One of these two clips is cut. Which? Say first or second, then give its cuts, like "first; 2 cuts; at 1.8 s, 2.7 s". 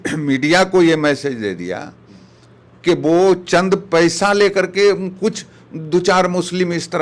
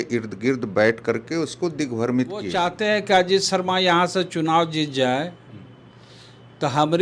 second; 1 cut; at 2.5 s